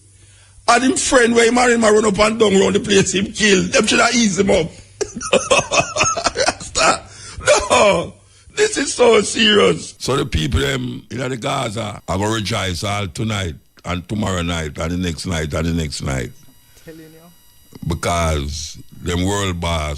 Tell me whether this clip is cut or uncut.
cut